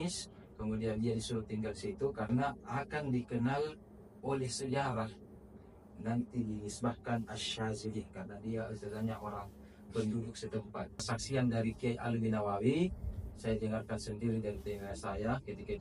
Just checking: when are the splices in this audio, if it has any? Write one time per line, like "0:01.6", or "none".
0:11.0